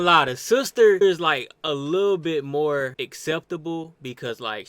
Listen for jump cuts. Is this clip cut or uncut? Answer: cut